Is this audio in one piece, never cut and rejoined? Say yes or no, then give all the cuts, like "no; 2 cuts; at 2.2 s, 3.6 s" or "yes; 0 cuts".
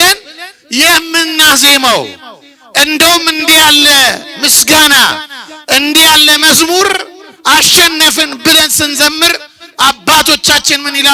yes; 0 cuts